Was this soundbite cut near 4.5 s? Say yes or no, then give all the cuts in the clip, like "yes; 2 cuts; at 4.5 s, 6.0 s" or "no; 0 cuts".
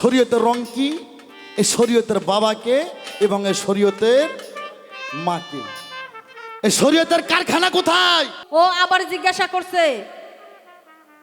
no; 1 cut; at 8.4 s